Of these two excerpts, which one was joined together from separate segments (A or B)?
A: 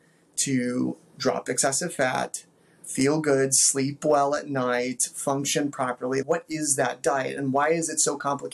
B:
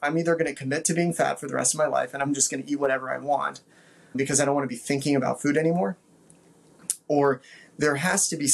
B